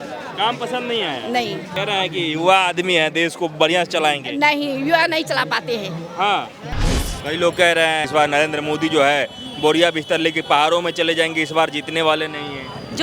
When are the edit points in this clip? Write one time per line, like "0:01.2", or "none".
0:01.7
0:06.9
0:08.1